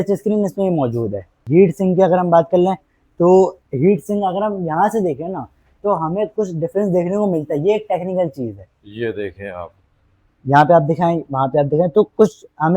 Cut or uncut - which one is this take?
cut